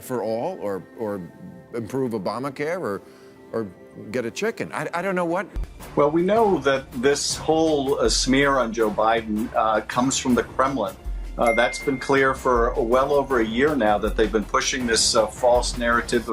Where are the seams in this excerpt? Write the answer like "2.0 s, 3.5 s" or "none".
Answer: 5.8 s